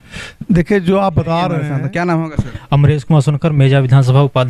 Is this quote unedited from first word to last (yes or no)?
no